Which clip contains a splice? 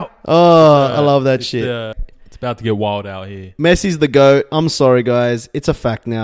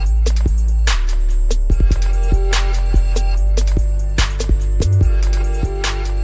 first; 1 cut; at 1.8 s

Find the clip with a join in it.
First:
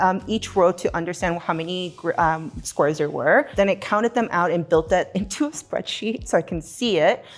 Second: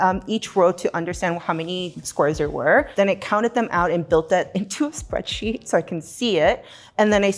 second; 1 cut; at 1.9 s

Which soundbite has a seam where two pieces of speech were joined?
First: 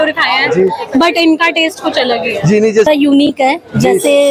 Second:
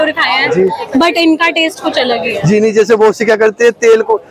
first; 1 cut; at 2.9 s

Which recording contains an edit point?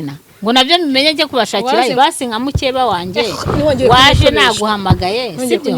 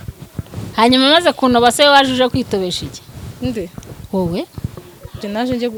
first; 1 cut; at 1.9 s

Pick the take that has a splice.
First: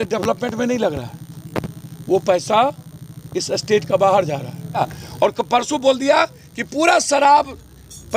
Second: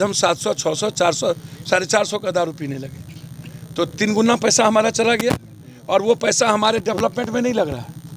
first; 1 cut; at 4.8 s

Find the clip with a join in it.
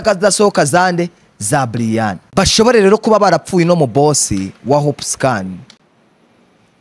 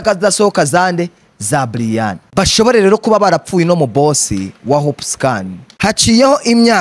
second; 1 cut; at 5.6 s

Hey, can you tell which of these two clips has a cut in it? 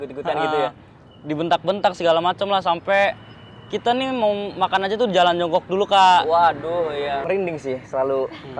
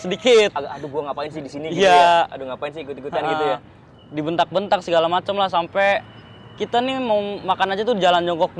first; 1 cut; at 7.2 s

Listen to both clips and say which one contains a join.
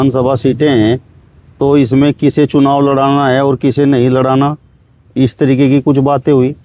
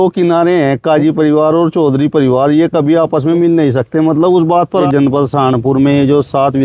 second; 1 cut; at 4.9 s

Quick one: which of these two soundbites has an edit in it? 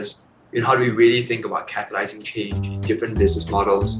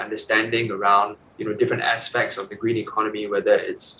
second; 1 cut; at 1.3 s

